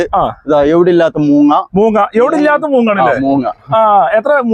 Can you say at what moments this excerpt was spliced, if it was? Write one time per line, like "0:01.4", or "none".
none